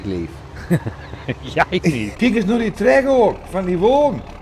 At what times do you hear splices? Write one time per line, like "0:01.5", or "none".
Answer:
0:02.1